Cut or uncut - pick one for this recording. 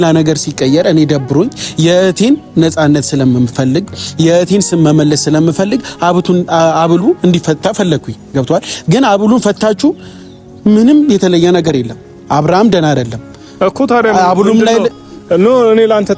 uncut